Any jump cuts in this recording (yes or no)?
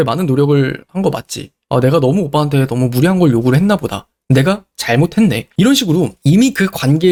no